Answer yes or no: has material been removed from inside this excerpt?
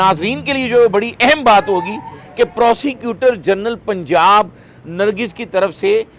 no